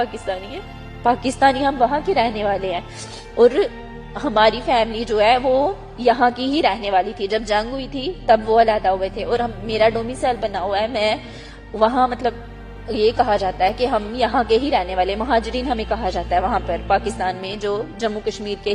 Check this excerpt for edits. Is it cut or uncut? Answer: uncut